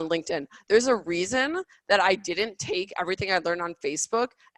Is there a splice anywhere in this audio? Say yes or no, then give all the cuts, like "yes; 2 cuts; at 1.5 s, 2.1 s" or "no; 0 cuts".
no; 0 cuts